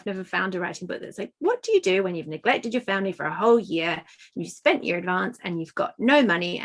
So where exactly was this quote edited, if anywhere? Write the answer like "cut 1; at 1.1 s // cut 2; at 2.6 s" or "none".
none